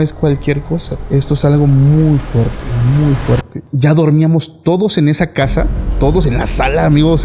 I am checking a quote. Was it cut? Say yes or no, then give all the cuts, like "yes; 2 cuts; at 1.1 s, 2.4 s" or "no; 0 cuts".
yes; 2 cuts; at 0.9 s, 3.6 s